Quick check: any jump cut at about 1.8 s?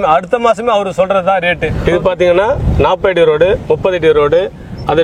yes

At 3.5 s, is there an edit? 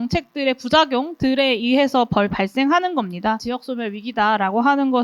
yes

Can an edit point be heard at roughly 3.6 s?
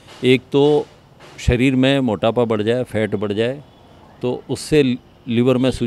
no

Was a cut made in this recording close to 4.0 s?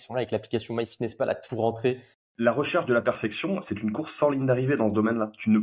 no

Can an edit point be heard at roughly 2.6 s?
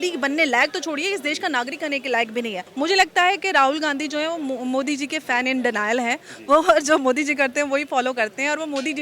yes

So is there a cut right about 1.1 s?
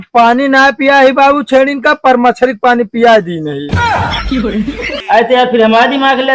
no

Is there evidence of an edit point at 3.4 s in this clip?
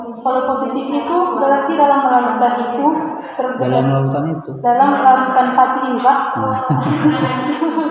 no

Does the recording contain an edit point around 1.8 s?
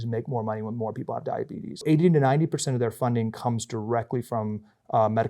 yes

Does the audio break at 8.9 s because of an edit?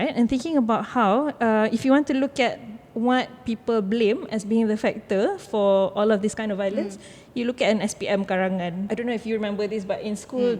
yes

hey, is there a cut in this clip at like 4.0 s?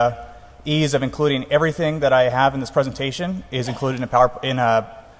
yes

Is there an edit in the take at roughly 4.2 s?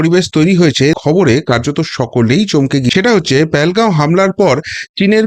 no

